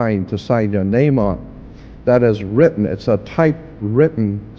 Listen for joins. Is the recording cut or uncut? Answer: uncut